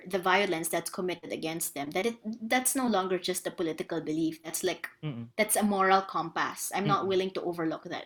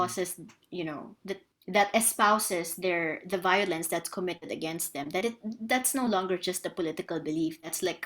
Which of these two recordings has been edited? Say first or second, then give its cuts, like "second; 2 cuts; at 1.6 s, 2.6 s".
second; 1 cut; at 1.5 s